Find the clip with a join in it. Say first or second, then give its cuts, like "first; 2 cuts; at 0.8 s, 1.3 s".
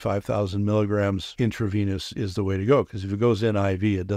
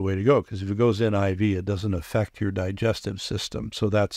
first; 1 cut; at 1.3 s